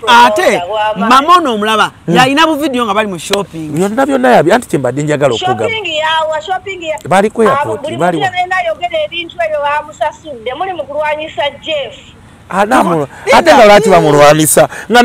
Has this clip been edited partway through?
no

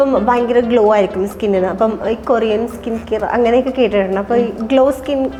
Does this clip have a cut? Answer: no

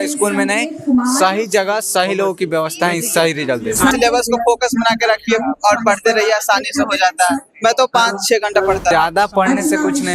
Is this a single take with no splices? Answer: no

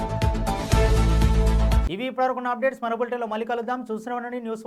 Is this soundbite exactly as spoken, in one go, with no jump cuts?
yes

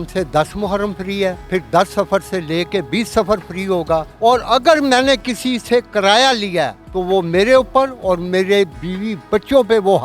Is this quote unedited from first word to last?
no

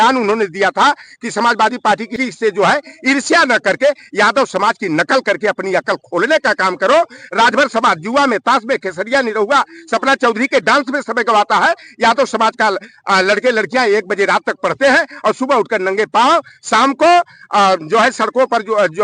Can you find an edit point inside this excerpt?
yes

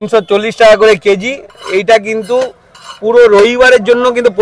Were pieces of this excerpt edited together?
no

